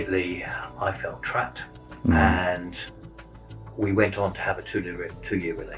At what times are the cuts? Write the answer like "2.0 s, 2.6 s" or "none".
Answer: none